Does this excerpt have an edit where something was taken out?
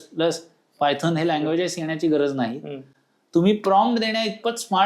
no; 0 cuts

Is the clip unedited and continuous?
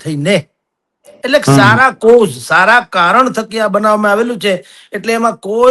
yes; 0 cuts

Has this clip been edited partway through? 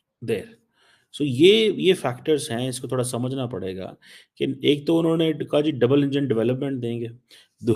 no; 0 cuts

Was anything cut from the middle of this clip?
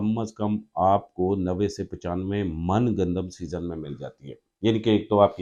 no; 0 cuts

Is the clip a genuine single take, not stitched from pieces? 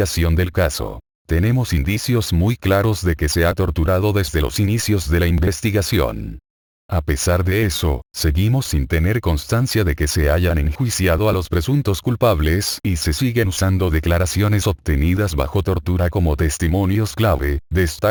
yes; 0 cuts

